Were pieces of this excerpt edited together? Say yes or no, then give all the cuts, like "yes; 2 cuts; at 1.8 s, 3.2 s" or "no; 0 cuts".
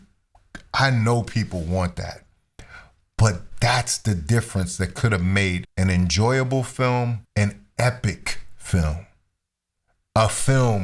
yes; 1 cut; at 7.2 s